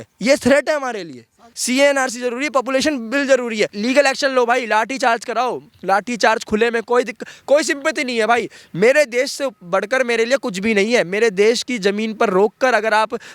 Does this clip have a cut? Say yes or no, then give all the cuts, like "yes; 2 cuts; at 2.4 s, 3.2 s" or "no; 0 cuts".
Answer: yes; 2 cuts; at 1.5 s, 3.8 s